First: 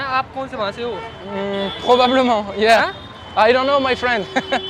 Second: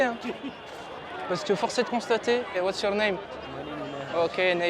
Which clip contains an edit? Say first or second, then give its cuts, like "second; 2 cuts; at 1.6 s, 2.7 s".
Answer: second; 1 cut; at 2.5 s